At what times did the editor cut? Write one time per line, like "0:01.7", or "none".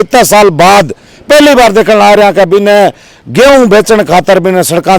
none